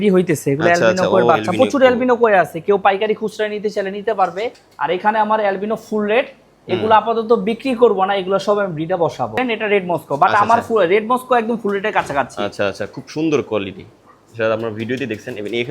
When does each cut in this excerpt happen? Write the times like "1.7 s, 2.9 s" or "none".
4.6 s, 9.4 s

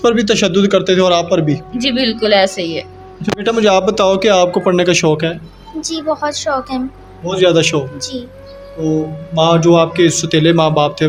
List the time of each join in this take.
none

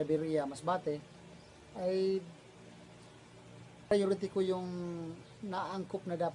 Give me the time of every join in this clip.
3.9 s

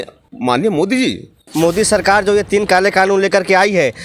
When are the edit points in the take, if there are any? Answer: 1.5 s

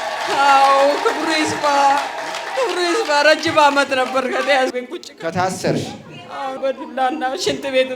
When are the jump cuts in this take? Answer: 4.7 s, 6.6 s

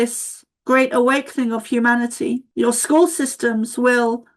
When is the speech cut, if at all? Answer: 2.5 s

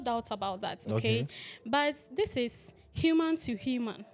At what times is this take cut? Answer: none

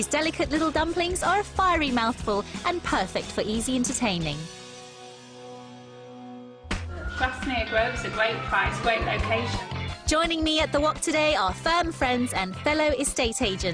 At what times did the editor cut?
2.2 s

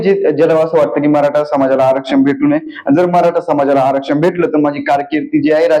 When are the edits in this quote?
none

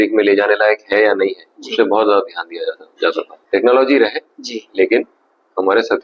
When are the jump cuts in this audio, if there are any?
3.3 s

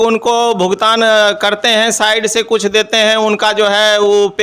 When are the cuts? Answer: none

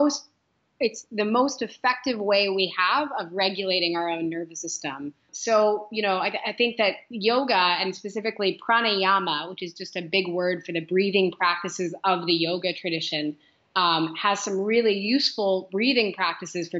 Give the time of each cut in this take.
5.3 s

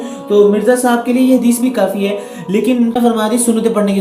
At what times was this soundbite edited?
2.9 s

